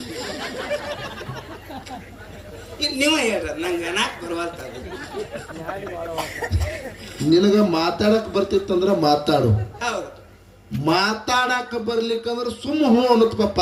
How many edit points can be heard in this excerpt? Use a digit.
0